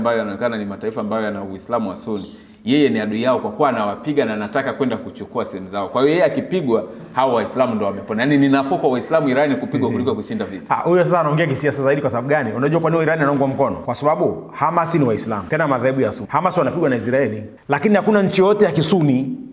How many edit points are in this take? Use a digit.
4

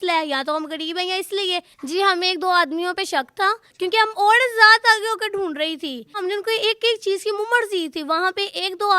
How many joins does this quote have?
3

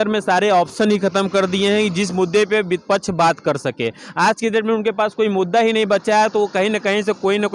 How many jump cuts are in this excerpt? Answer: 0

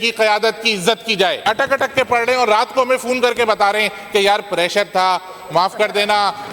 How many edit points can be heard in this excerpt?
1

